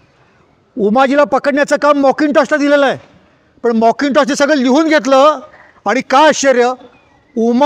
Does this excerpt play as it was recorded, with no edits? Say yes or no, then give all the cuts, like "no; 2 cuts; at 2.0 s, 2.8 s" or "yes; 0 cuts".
yes; 0 cuts